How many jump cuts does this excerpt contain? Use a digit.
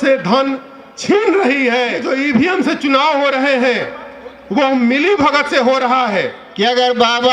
2